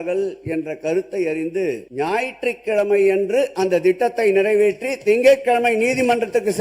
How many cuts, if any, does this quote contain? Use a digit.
1